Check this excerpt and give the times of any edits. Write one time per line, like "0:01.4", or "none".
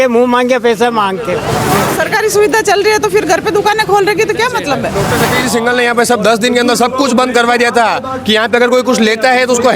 0:01.6
0:05.0